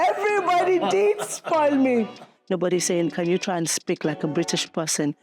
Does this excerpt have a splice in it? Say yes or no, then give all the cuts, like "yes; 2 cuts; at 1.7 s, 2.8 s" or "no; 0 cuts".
yes; 1 cut; at 2.3 s